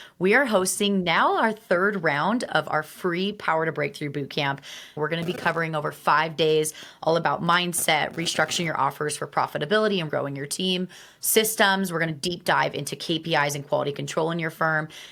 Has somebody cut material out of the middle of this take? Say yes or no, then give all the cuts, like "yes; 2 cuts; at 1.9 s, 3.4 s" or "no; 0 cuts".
no; 0 cuts